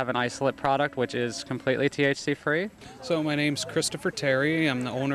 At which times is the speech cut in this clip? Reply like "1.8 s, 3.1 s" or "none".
2.9 s